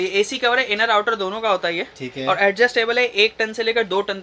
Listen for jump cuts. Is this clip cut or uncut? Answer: uncut